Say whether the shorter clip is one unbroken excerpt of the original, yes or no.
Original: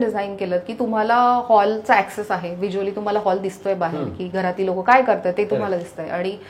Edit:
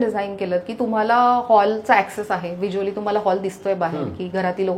yes